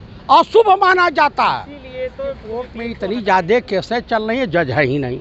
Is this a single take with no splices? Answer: no; 1 cut; at 2.8 s

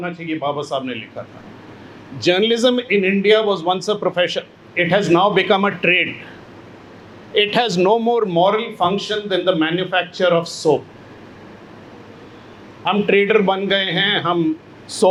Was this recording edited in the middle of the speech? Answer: no; 0 cuts

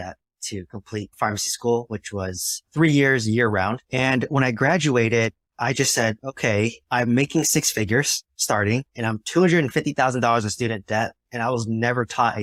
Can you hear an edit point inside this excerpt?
no; 0 cuts

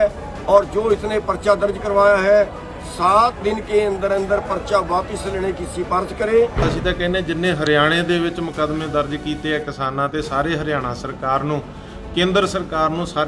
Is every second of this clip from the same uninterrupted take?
no; 1 cut; at 6.6 s

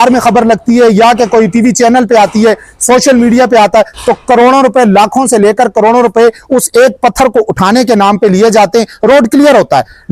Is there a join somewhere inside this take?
no; 0 cuts

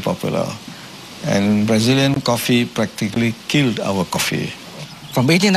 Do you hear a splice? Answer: no; 0 cuts

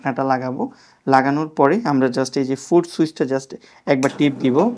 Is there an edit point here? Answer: no; 0 cuts

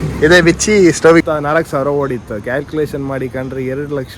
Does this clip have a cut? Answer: yes; 1 cut; at 1.2 s

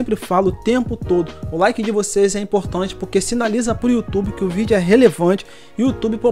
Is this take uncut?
yes; 0 cuts

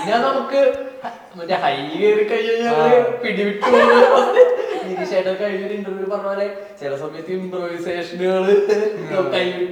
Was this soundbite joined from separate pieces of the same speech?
no; 0 cuts

